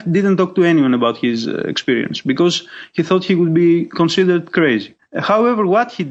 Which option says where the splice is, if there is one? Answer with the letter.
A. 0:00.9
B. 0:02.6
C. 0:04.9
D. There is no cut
D